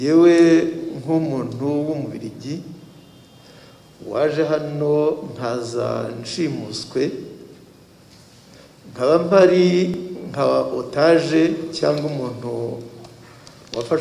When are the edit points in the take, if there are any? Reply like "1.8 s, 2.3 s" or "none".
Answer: none